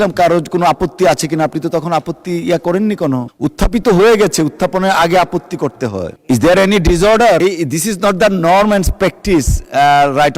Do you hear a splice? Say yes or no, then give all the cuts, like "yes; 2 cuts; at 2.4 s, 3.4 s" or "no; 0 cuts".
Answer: yes; 3 cuts; at 3.3 s, 6.1 s, 7.4 s